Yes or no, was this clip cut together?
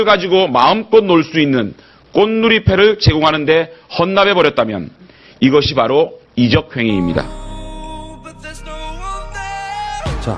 yes